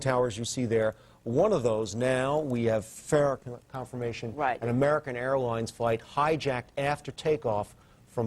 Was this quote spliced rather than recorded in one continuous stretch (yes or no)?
yes